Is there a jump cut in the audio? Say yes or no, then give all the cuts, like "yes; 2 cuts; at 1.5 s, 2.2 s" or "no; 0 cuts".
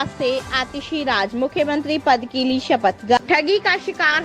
yes; 1 cut; at 3.2 s